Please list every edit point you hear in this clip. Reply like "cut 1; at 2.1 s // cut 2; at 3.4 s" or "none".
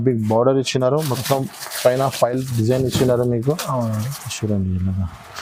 none